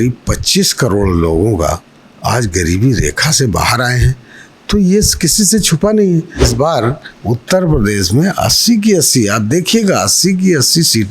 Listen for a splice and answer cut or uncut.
cut